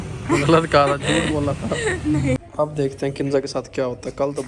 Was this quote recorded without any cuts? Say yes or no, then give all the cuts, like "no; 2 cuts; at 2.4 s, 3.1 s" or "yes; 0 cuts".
no; 1 cut; at 2.4 s